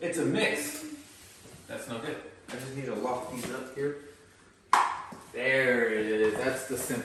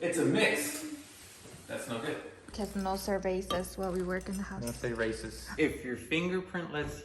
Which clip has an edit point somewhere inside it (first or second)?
second